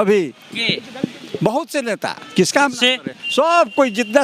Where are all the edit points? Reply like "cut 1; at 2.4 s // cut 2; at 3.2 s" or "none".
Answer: none